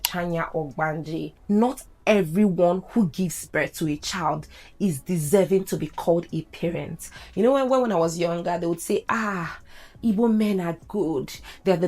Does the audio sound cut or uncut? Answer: cut